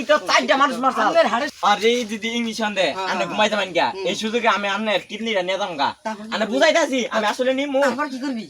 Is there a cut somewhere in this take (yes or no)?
yes